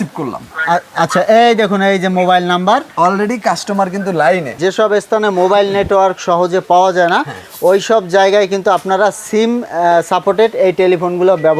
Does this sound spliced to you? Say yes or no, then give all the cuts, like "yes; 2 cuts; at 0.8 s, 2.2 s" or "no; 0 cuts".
yes; 1 cut; at 4.5 s